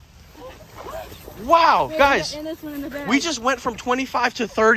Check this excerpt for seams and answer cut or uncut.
uncut